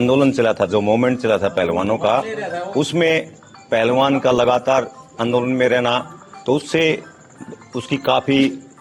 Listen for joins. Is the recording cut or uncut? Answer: uncut